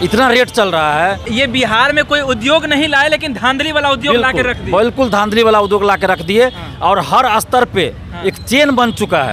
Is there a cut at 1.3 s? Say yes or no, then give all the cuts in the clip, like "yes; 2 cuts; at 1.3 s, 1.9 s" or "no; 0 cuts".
yes; 1 cut; at 1.3 s